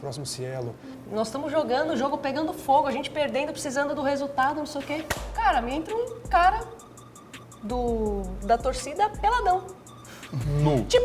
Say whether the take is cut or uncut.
cut